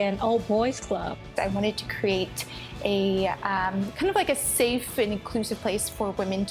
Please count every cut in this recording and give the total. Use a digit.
1